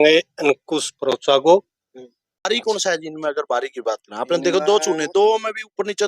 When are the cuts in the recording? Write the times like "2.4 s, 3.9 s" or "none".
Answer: 2.5 s